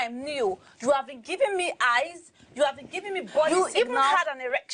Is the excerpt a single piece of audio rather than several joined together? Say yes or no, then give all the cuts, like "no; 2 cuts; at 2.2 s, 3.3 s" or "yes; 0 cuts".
yes; 0 cuts